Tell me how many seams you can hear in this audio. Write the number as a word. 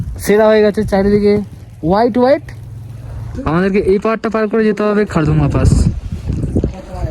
one